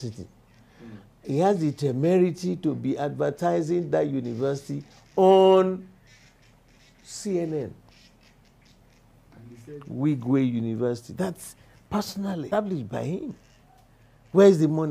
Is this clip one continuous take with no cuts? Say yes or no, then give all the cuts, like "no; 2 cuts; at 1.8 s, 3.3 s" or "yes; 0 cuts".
no; 1 cut; at 12.6 s